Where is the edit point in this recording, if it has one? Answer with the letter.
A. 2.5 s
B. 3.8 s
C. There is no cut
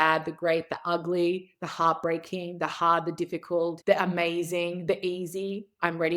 B